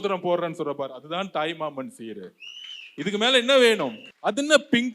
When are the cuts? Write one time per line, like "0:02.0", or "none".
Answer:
0:04.1